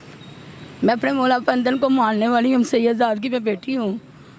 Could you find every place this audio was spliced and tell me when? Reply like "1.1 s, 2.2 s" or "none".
none